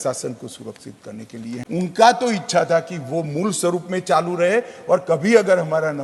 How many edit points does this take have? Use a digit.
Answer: 1